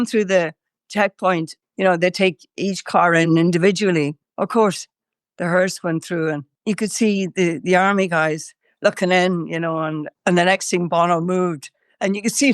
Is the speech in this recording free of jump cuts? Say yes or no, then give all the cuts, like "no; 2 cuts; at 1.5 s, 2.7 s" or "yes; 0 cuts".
no; 2 cuts; at 4.2 s, 6.5 s